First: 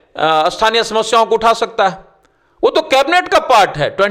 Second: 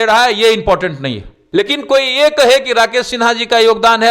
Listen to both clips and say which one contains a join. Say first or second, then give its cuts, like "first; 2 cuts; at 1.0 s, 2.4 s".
second; 1 cut; at 1.4 s